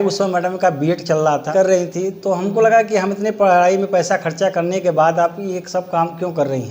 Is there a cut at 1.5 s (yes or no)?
yes